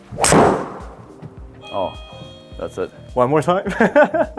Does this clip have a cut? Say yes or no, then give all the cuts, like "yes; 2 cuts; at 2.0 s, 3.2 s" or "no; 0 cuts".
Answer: no; 0 cuts